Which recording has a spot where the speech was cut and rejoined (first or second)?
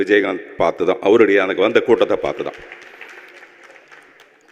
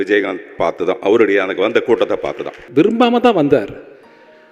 second